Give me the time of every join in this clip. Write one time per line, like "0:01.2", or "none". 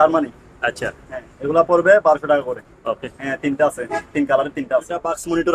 none